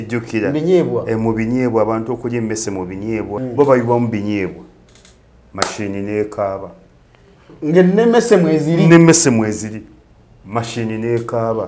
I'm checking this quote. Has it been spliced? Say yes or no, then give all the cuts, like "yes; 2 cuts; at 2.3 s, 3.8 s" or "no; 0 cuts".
yes; 1 cut; at 3.3 s